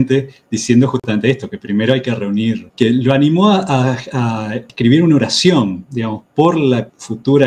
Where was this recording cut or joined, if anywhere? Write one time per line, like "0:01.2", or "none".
0:04.6

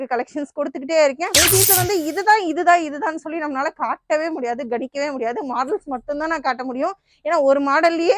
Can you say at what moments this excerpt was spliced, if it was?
0:01.3

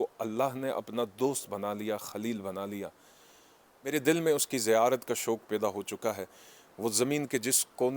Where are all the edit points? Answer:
none

